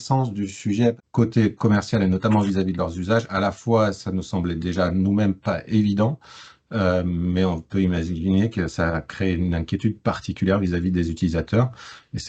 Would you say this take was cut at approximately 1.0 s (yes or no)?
yes